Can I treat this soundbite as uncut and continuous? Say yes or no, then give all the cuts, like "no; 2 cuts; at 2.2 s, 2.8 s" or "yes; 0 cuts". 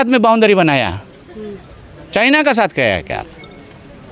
yes; 0 cuts